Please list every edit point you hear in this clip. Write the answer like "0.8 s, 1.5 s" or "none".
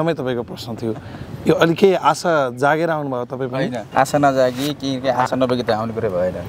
3.8 s